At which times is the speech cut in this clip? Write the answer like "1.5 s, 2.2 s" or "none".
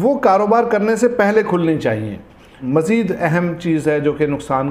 2.6 s